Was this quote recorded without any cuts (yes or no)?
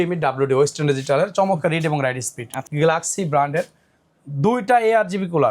no